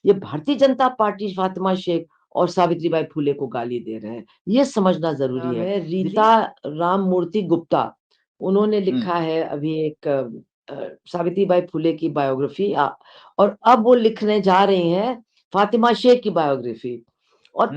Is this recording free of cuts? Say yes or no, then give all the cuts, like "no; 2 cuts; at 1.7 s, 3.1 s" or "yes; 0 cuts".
no; 1 cut; at 5.7 s